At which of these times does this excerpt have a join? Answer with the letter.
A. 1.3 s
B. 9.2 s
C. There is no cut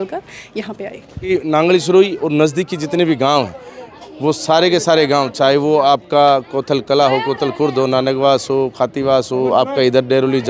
A